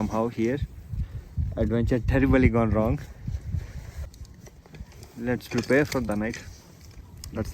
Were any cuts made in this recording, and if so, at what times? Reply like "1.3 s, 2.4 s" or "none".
4.1 s